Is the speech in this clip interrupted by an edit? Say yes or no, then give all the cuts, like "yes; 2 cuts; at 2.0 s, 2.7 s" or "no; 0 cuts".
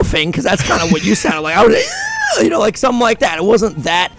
no; 0 cuts